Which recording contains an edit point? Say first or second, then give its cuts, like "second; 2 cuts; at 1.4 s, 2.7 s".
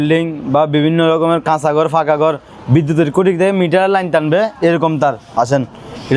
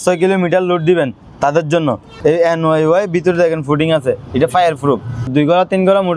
second; 2 cuts; at 2.1 s, 5.3 s